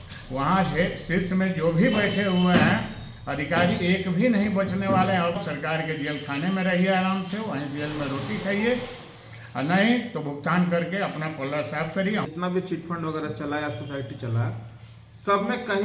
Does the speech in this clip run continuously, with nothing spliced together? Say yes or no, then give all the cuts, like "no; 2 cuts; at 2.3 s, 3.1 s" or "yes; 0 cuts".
no; 2 cuts; at 5.4 s, 12.3 s